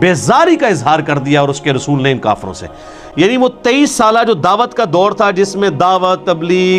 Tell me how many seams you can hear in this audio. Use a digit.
0